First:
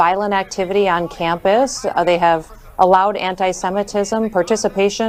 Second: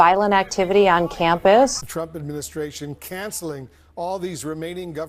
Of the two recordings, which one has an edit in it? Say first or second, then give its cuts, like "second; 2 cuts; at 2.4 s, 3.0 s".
second; 1 cut; at 1.8 s